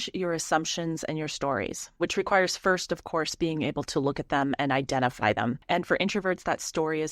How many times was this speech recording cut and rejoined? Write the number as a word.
two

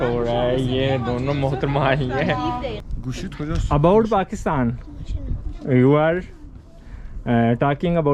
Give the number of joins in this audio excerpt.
one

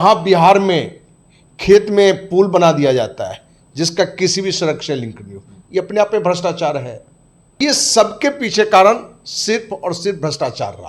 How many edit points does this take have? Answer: one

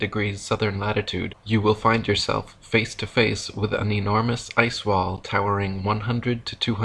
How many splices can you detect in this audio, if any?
one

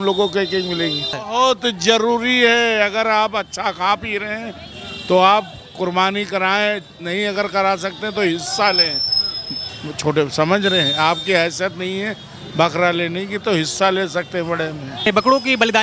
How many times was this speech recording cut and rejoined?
two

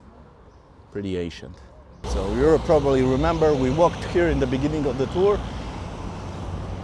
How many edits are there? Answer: one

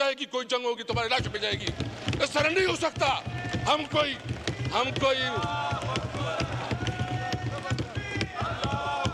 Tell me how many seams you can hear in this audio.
zero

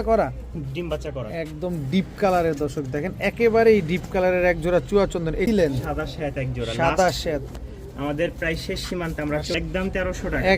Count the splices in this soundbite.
two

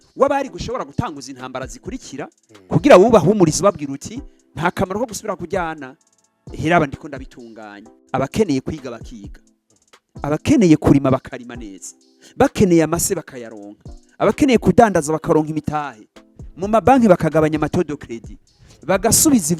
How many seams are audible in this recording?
one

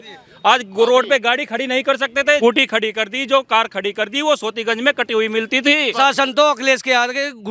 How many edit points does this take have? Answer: two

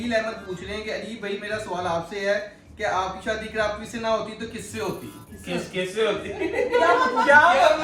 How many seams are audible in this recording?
zero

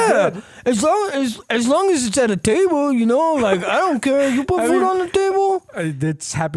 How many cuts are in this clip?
zero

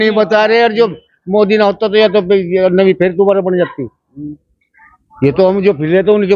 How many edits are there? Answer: zero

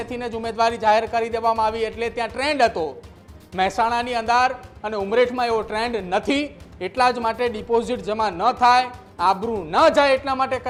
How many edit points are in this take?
zero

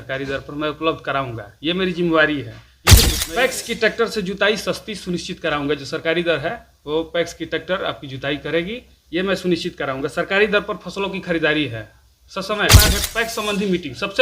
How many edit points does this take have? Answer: two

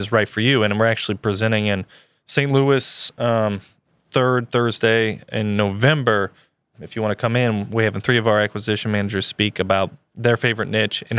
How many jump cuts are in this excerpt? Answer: one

